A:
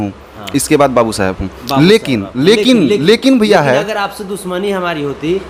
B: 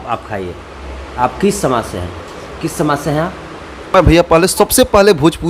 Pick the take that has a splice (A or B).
B